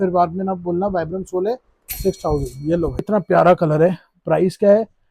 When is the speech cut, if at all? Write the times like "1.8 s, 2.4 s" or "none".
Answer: 3.0 s